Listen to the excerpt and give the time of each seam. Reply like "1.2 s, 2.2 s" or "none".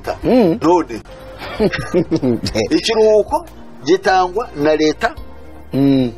none